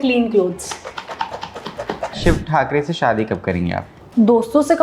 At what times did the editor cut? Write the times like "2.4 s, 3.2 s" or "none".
2.2 s, 4.0 s